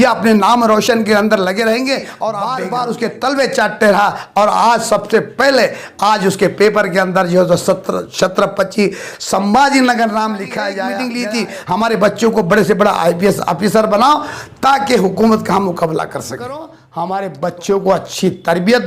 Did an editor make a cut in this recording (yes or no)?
yes